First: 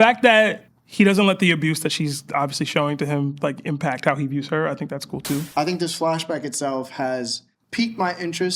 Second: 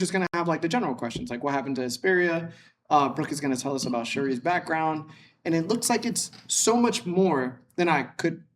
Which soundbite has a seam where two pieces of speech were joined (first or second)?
first